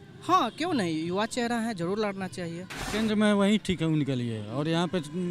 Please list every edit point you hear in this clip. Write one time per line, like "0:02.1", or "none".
0:02.8